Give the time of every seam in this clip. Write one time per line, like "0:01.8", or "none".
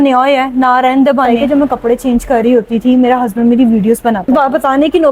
0:01.3
0:04.2